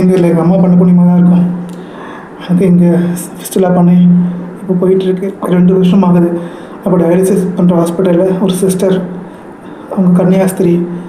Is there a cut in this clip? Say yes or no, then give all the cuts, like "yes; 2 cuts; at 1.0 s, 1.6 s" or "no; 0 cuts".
yes; 1 cut; at 5.0 s